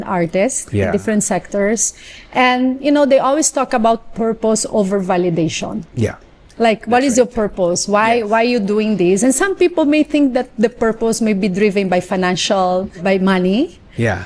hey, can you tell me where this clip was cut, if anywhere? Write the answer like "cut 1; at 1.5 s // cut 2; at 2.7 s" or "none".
cut 1; at 12.9 s